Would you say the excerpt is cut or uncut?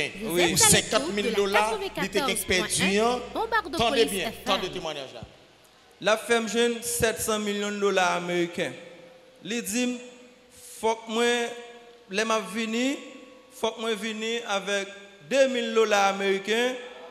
uncut